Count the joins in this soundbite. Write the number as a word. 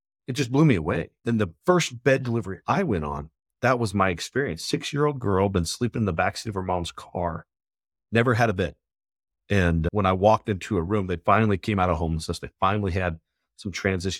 zero